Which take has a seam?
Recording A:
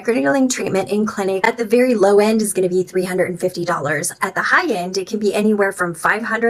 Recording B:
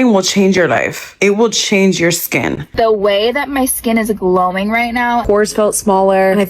B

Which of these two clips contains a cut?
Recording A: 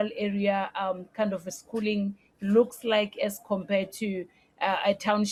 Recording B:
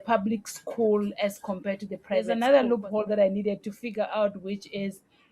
B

